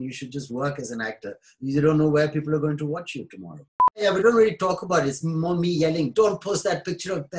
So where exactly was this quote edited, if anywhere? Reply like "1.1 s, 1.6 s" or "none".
4.0 s